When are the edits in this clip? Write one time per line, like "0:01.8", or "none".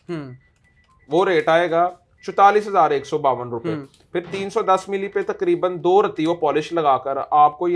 none